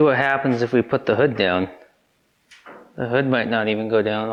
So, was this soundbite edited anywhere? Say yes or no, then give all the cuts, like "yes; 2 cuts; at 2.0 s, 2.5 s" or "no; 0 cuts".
no; 0 cuts